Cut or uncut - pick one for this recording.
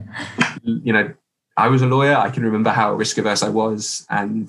uncut